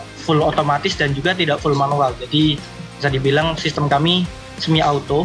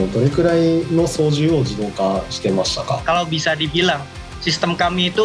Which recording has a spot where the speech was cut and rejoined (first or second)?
second